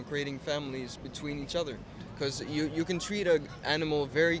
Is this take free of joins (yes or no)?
no